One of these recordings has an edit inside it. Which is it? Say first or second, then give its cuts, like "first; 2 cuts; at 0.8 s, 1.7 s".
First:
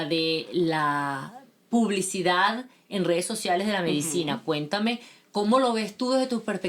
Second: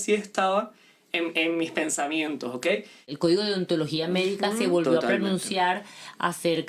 second; 1 cut; at 3.1 s